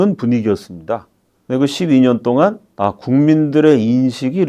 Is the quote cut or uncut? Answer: cut